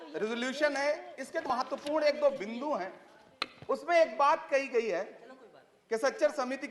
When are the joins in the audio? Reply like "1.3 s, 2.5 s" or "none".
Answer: 1.5 s